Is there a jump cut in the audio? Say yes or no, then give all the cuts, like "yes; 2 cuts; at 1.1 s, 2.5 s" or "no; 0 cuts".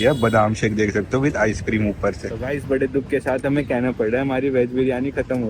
yes; 1 cut; at 2.3 s